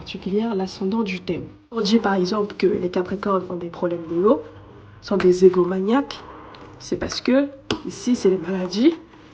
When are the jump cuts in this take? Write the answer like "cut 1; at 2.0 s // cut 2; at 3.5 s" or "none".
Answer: cut 1; at 1.8 s